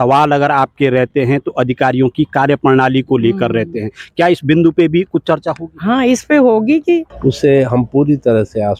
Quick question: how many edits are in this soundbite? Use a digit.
1